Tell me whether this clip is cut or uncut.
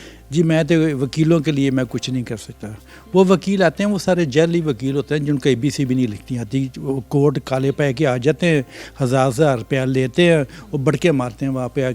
uncut